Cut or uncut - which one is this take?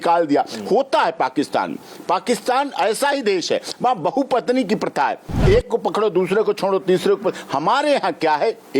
uncut